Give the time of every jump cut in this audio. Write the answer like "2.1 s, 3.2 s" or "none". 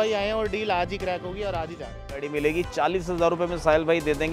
2.3 s